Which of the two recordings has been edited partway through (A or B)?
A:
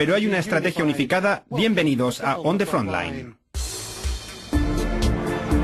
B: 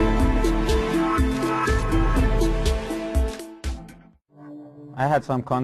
A